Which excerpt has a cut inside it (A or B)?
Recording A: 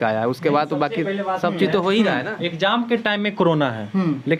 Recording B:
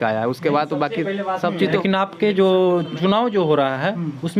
B